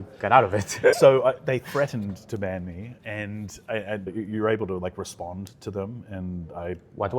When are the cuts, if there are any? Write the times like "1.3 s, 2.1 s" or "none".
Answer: 0.9 s, 2.9 s, 4.1 s